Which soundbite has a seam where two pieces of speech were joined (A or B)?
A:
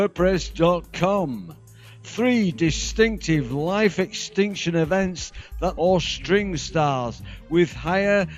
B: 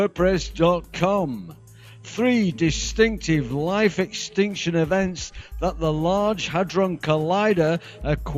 B